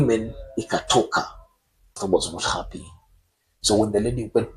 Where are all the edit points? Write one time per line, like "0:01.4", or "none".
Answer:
0:02.0